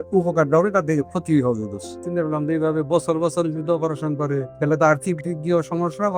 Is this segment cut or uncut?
cut